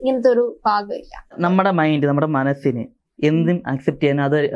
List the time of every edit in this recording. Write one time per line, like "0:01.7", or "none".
0:01.3